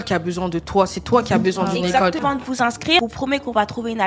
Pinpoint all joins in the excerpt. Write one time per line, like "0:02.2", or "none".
0:02.2